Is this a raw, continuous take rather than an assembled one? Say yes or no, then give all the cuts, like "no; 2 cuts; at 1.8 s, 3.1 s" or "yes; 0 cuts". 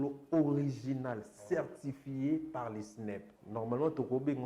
no; 1 cut; at 3.3 s